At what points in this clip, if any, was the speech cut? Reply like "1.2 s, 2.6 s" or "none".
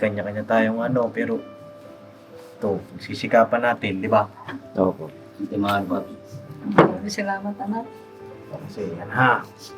none